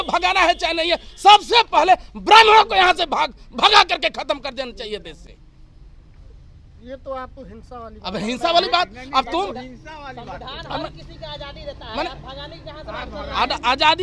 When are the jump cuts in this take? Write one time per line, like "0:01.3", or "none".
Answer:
none